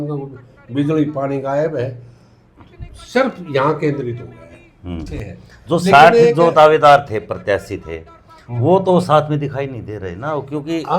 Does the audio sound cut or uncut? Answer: cut